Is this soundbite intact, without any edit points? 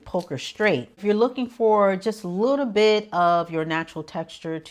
no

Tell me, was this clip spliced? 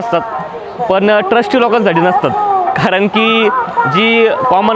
no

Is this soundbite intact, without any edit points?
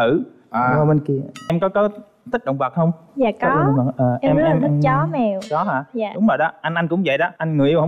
no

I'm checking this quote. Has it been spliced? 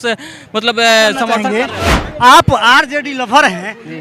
yes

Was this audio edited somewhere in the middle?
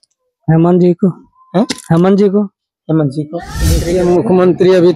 yes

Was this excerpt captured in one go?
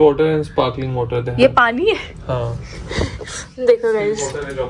yes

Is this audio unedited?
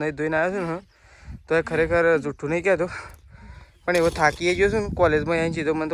yes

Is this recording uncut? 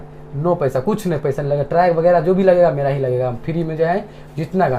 yes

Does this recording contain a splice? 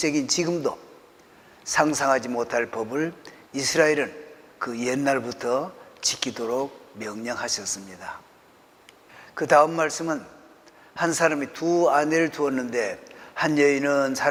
no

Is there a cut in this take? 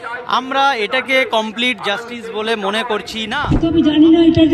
yes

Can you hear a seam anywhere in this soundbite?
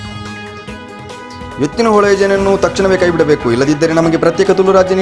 yes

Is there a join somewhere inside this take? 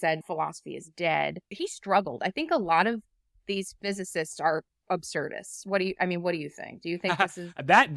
yes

